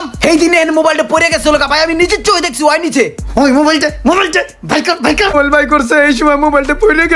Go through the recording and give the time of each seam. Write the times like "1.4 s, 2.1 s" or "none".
5.4 s